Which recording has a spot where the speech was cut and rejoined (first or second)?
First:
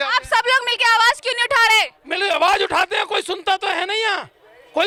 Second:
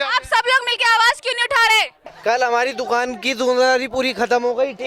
second